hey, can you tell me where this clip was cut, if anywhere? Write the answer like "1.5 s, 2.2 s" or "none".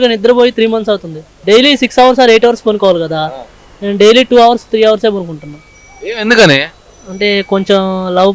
1.3 s